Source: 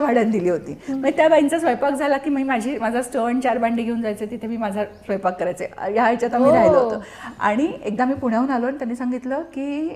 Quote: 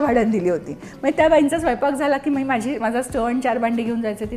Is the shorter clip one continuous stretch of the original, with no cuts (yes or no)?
yes